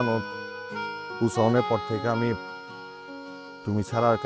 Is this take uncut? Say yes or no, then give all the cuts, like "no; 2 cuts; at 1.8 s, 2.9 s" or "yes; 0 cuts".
yes; 0 cuts